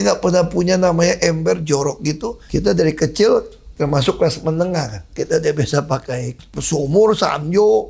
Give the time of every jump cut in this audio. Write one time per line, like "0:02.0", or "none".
0:02.4
0:05.1
0:06.6